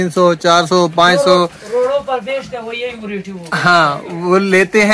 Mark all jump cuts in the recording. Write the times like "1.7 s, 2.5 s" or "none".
none